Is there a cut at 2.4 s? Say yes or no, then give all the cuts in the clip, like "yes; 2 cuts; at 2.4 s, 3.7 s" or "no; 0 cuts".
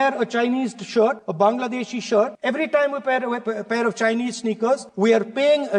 yes; 3 cuts; at 1.2 s, 2.4 s, 4.9 s